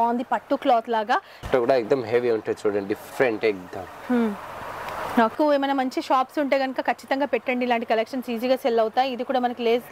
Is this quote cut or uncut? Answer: cut